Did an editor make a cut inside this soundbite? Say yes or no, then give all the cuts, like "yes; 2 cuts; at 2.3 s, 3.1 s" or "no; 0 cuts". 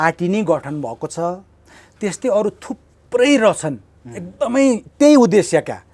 no; 0 cuts